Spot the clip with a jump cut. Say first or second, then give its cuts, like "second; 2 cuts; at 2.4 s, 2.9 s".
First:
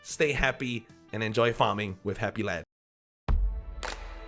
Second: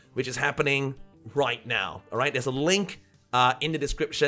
first; 1 cut; at 2.7 s